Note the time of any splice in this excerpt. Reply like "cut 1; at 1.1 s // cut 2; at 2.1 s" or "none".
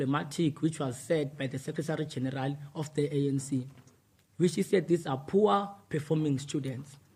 none